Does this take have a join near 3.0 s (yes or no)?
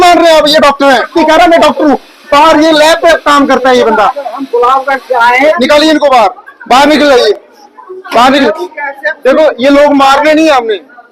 no